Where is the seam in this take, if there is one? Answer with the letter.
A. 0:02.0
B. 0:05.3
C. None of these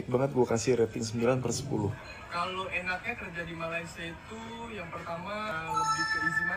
A